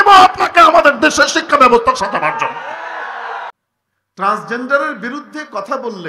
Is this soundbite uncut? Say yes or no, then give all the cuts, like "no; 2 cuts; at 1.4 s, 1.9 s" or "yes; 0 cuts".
no; 1 cut; at 3.5 s